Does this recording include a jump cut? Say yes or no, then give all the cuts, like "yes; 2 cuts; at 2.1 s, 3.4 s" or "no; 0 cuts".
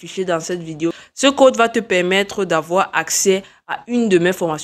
yes; 1 cut; at 1.0 s